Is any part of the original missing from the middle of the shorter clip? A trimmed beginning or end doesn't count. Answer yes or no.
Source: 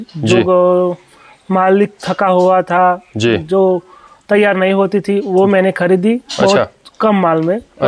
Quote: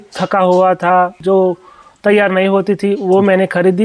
yes